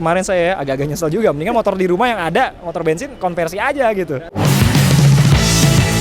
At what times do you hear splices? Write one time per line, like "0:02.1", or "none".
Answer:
0:04.3